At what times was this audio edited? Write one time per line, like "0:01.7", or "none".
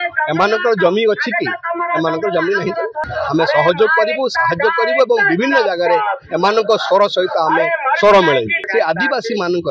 0:03.1
0:08.5